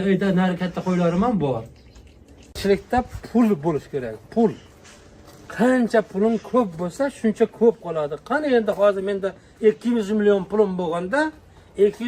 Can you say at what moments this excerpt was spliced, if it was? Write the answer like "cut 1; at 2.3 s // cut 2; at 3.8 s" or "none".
cut 1; at 2.6 s